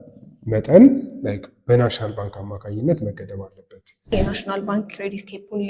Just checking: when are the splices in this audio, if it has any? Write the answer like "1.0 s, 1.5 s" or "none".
4.1 s